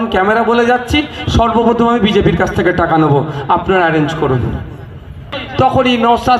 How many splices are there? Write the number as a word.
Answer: one